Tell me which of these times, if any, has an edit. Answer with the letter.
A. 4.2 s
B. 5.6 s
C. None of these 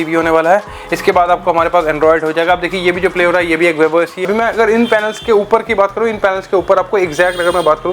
A